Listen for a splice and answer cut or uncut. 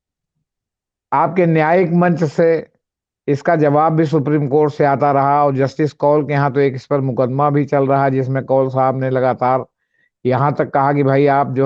uncut